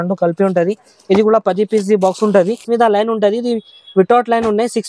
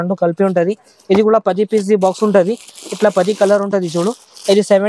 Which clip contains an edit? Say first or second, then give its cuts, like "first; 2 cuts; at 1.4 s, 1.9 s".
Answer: first; 1 cut; at 2.6 s